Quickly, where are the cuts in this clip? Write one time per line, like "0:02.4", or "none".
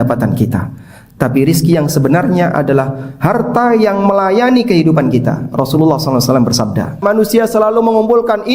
0:07.0